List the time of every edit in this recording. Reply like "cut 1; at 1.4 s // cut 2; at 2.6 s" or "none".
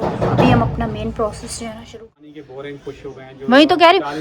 cut 1; at 2.0 s